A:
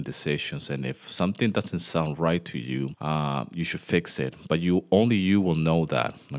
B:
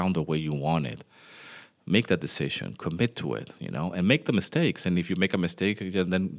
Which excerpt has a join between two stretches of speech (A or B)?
A